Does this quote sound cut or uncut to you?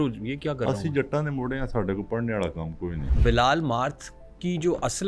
cut